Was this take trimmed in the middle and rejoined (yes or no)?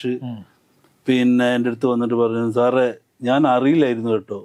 no